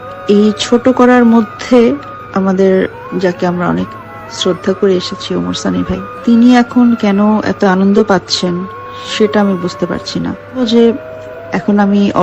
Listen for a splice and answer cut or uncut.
cut